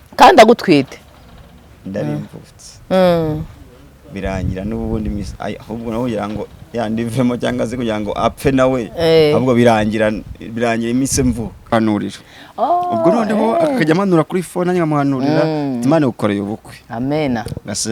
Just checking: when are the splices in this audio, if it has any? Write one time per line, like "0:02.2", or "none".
0:11.7